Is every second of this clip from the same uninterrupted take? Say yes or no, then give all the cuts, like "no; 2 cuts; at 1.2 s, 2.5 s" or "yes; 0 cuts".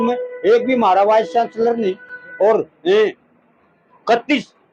yes; 0 cuts